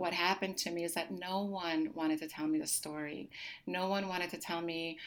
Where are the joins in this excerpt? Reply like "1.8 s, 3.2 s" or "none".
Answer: none